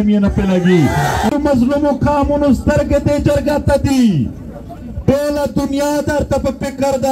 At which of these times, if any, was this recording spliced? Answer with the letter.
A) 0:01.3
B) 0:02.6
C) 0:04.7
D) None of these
A